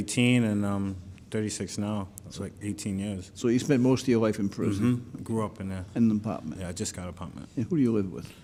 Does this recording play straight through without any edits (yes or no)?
yes